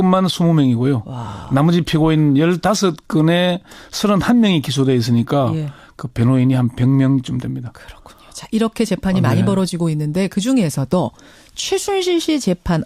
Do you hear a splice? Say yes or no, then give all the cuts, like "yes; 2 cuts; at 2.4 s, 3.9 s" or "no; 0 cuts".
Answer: no; 0 cuts